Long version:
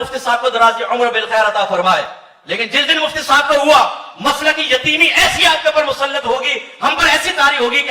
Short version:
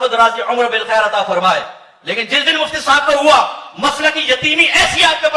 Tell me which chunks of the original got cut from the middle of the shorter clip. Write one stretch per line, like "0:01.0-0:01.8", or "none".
none